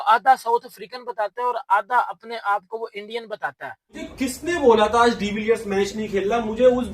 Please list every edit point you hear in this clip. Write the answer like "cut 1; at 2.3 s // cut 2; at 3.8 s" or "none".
cut 1; at 4.1 s